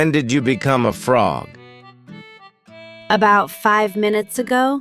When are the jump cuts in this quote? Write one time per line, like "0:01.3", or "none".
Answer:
0:01.5
0:03.1